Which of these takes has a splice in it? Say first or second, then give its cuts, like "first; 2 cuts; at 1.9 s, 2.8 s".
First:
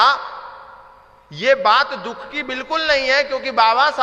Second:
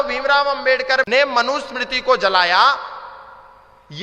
second; 1 cut; at 1.1 s